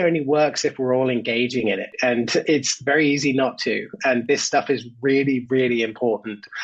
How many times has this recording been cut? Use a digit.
0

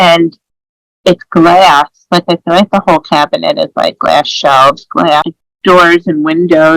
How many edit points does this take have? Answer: 1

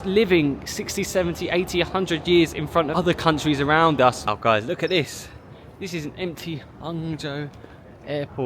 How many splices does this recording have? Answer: 2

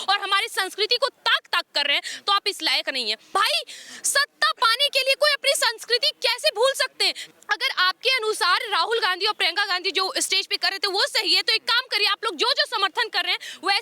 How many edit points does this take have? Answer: 2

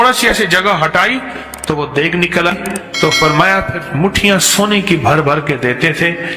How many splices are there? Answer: 1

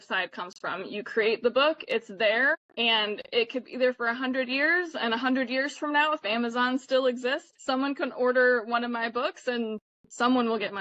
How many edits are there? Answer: 2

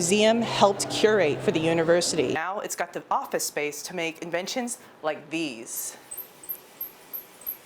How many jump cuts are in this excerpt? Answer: 1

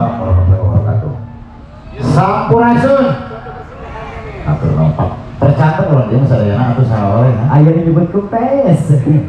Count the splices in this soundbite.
0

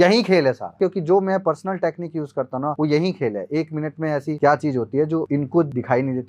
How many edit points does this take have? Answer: 4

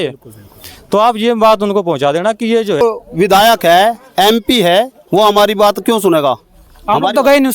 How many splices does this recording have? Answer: 1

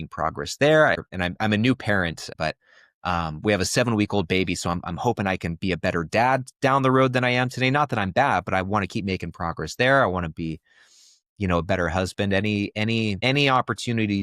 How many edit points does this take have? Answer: 3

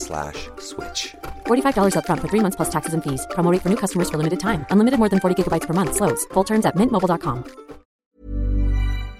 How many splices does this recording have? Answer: 1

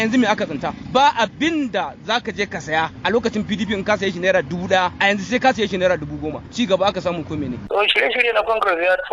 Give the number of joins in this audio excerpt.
4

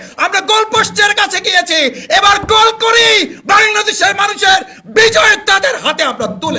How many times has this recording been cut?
0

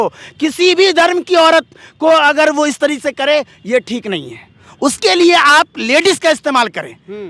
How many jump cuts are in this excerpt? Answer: 0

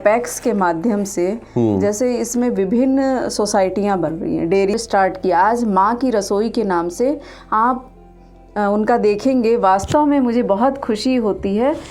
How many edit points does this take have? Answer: 1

